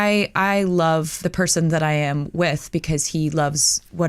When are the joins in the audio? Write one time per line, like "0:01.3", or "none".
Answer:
none